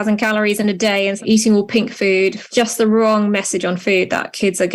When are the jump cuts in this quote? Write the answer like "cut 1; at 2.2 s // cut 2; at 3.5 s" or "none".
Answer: cut 1; at 1.2 s // cut 2; at 2.4 s